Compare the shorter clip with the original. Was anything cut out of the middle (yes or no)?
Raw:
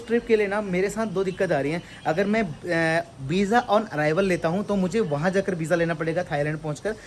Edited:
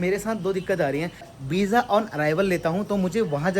yes